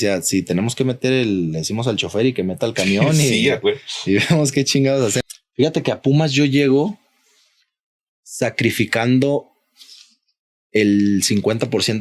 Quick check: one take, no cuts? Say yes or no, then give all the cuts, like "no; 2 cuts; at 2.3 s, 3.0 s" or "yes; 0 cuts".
no; 1 cut; at 5.2 s